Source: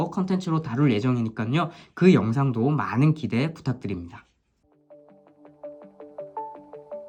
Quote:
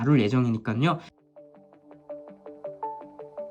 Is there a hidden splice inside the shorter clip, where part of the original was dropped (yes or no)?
yes